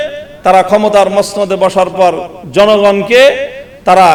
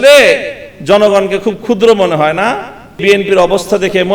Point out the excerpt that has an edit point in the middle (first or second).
second